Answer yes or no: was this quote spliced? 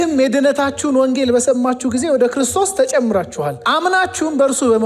yes